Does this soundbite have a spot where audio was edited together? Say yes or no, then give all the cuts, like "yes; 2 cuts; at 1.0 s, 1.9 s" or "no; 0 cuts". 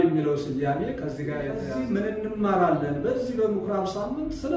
yes; 1 cut; at 1.7 s